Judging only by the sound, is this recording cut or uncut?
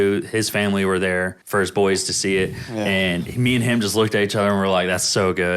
cut